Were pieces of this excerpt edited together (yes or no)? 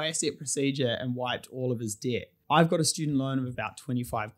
yes